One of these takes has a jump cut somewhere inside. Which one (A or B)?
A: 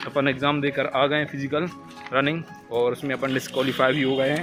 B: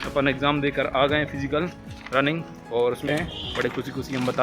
B